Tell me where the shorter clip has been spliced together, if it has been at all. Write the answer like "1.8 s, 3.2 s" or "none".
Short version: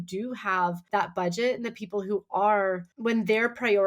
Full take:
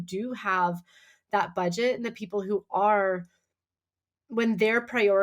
0.8 s, 2.9 s